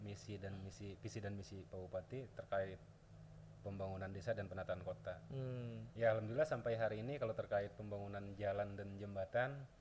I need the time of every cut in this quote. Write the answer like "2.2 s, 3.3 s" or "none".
none